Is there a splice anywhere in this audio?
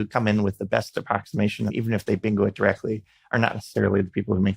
yes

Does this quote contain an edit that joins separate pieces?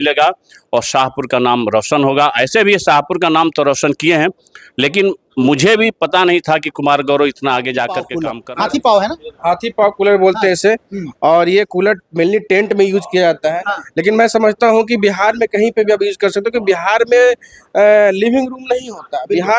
yes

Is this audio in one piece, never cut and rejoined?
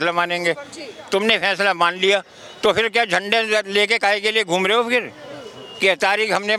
yes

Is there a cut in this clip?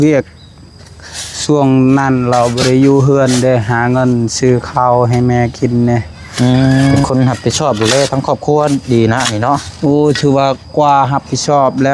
yes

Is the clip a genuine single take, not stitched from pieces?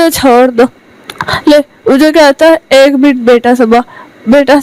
yes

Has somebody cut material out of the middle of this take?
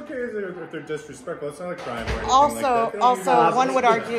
no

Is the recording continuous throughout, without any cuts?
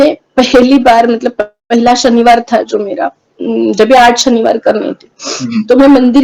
yes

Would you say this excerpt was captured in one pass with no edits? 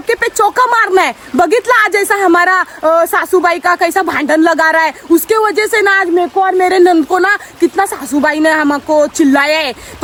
yes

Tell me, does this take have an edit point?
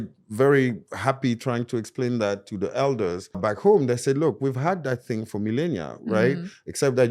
yes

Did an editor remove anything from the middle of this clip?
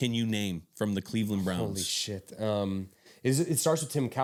no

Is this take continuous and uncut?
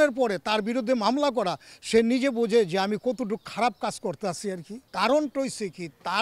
no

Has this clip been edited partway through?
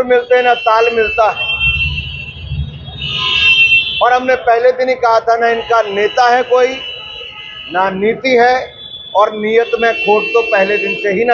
no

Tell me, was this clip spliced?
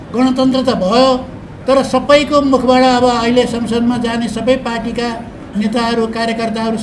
no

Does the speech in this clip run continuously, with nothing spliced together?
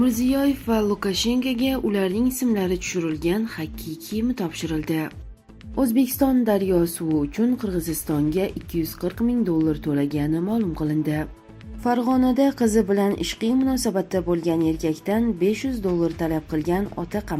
no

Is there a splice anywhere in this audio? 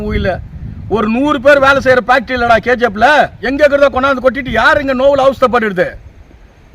yes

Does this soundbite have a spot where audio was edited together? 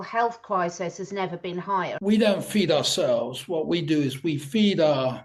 yes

